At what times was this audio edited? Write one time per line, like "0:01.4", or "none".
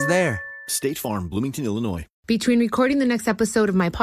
0:02.1